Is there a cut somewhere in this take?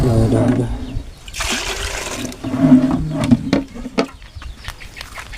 yes; 1 cut; at 4.3 s

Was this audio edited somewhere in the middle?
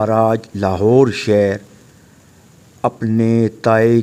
no; 0 cuts

